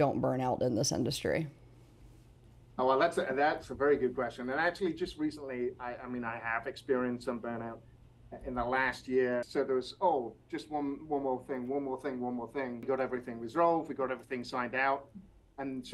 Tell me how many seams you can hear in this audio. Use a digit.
2